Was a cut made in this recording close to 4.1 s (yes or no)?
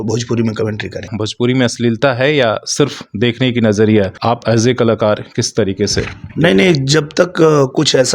yes